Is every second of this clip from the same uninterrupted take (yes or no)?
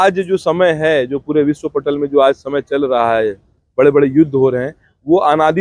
yes